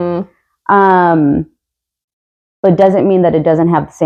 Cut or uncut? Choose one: uncut